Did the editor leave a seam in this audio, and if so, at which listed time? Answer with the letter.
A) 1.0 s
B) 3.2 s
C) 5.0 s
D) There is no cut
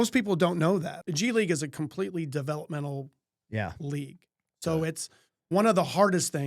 A